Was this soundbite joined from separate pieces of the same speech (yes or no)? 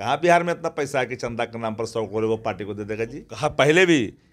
yes